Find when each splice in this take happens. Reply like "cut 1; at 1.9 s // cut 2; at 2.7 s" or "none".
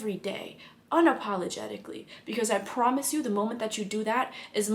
none

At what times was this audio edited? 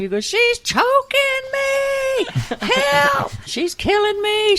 cut 1; at 3.4 s

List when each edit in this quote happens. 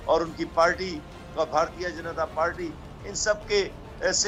none

